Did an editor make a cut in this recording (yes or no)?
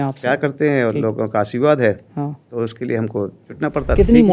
no